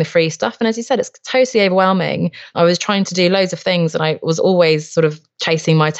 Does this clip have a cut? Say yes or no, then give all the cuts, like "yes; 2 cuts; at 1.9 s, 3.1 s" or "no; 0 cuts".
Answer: yes; 1 cut; at 2.5 s